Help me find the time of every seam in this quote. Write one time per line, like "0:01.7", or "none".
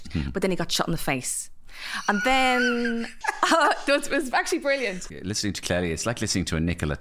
0:03.1
0:05.0